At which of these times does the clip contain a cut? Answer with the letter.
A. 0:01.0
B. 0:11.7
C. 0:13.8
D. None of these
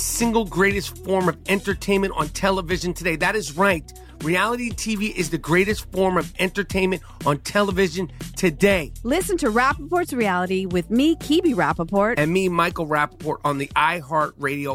D